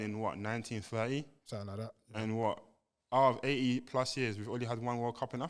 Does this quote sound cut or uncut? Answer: uncut